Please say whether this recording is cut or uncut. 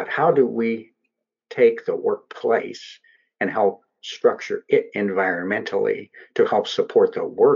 uncut